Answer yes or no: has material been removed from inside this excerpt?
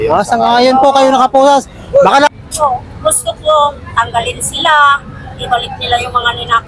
yes